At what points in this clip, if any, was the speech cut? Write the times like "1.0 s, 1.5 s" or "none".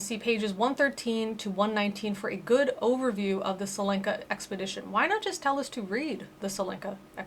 none